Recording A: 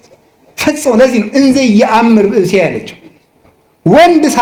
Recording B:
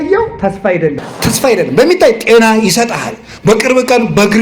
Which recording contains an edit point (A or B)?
B